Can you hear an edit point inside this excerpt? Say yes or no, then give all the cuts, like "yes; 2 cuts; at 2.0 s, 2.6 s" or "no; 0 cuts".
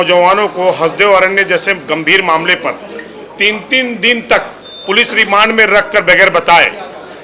no; 0 cuts